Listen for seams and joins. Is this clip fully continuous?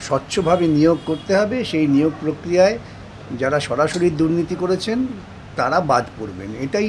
yes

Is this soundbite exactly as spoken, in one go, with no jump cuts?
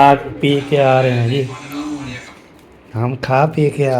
yes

